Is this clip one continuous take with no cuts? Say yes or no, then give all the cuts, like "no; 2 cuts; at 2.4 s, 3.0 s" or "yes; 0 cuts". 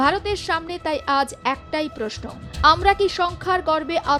yes; 0 cuts